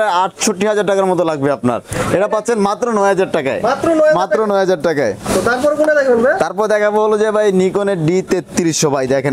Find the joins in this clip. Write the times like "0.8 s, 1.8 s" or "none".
none